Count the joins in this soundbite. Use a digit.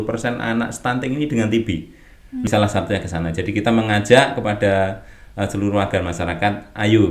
1